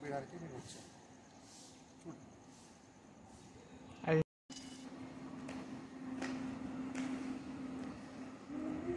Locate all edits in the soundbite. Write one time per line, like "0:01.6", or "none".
0:04.8